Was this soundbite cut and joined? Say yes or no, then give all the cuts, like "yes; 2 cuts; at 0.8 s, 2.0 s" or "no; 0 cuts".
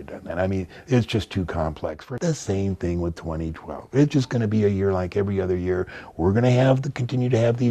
yes; 1 cut; at 2.0 s